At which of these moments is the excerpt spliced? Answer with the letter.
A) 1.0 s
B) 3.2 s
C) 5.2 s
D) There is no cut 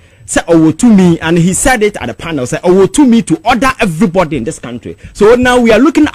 D